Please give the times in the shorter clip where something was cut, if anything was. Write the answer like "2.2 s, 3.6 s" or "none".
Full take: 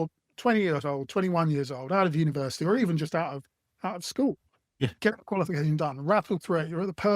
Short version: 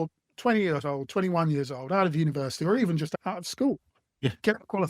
3.1 s